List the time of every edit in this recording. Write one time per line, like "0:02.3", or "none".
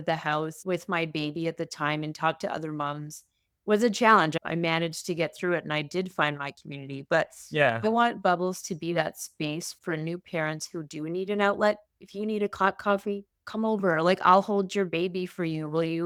none